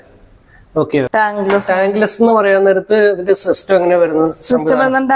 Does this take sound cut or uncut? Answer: cut